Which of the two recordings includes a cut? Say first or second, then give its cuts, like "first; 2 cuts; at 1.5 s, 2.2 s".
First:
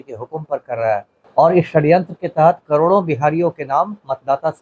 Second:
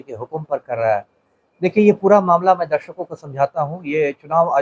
first; 1 cut; at 1.2 s